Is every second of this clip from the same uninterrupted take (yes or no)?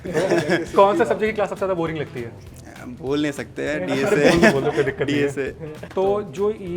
yes